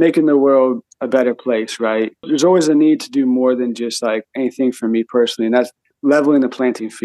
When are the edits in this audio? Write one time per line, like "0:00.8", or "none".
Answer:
0:00.9
0:02.3
0:05.8